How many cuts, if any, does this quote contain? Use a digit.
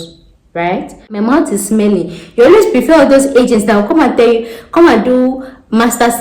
1